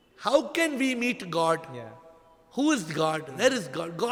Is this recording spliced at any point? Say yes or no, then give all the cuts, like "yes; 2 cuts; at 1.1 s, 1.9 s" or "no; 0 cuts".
no; 0 cuts